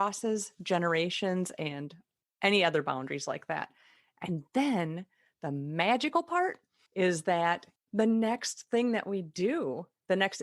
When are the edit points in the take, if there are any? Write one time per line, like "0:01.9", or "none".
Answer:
0:07.7